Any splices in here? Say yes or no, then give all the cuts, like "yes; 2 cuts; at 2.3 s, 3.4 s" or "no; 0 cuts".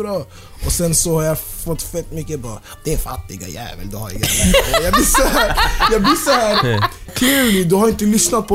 yes; 1 cut; at 7.1 s